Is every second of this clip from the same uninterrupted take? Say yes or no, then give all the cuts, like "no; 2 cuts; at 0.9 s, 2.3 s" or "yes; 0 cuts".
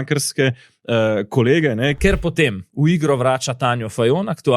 no; 1 cut; at 2.0 s